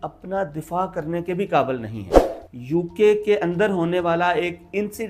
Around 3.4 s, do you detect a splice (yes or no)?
no